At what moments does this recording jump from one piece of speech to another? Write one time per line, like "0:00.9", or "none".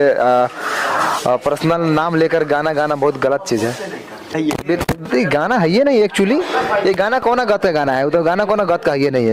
0:04.4